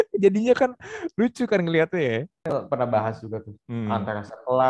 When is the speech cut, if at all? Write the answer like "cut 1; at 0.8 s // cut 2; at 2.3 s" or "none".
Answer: cut 1; at 2.5 s